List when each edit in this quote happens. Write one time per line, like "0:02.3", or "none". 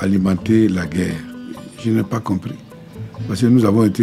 0:01.6